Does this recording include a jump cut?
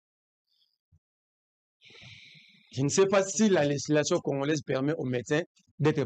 no; 0 cuts

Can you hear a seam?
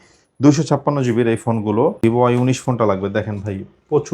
yes; 1 cut; at 2.0 s

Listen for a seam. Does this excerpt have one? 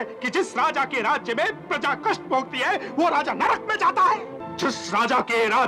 yes; 1 cut; at 4.3 s

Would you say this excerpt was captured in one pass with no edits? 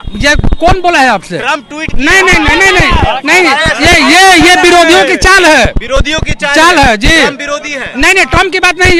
yes; 0 cuts

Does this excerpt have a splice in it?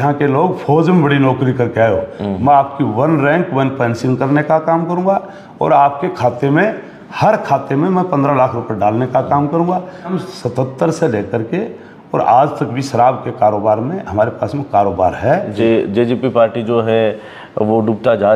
yes; 2 cuts; at 10.1 s, 15.6 s

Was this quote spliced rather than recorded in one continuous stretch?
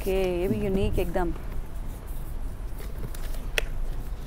no; 0 cuts

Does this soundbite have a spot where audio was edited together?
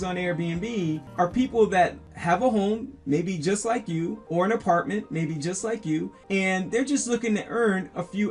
yes; 4 cuts; at 1.1 s, 2.1 s, 4.2 s, 6.2 s

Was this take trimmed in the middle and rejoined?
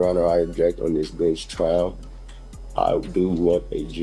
no; 0 cuts

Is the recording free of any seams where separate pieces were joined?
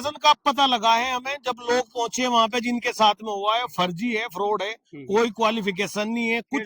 yes; 0 cuts

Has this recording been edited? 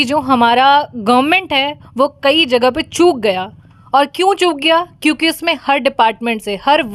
no; 0 cuts

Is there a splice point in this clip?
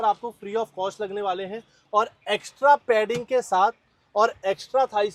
no; 0 cuts

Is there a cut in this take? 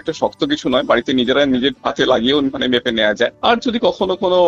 no; 0 cuts

